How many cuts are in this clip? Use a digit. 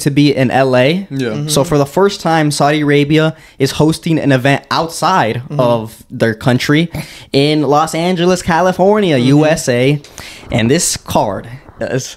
0